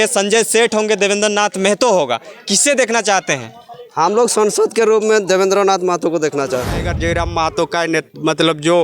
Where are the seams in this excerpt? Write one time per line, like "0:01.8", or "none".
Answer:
0:06.8